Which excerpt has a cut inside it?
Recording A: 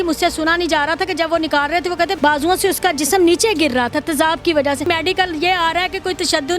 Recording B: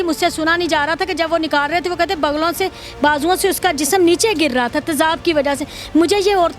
A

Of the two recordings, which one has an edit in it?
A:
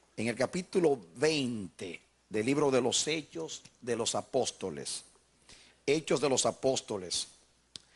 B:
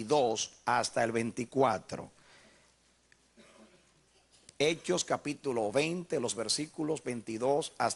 B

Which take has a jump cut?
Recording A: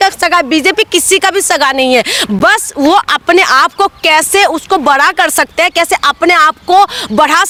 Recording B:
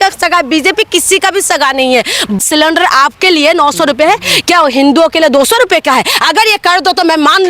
B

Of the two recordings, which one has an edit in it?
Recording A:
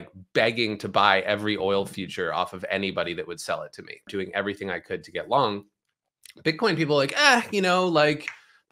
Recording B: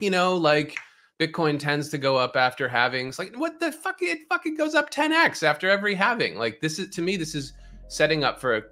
A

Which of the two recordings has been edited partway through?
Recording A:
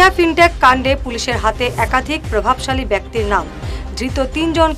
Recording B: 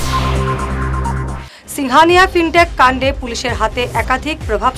B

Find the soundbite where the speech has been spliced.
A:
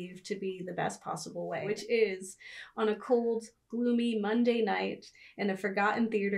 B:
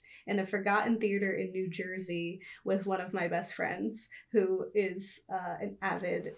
A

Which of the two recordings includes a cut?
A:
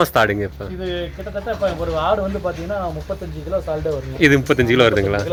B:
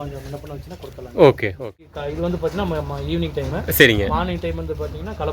B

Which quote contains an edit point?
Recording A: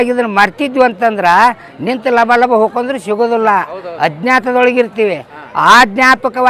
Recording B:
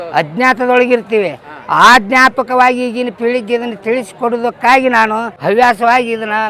B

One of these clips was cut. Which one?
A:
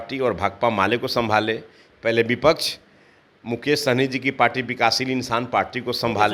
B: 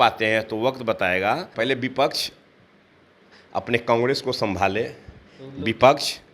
B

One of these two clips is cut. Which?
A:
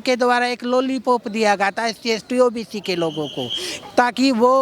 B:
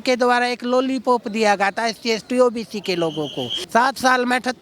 B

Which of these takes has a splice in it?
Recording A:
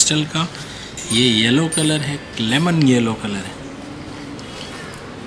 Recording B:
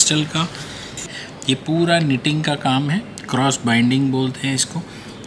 B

